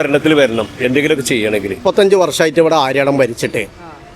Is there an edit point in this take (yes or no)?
yes